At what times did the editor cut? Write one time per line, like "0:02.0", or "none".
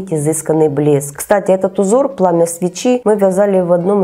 0:01.1